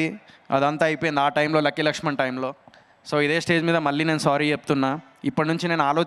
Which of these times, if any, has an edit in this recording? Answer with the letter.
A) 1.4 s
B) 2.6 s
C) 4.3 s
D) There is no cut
D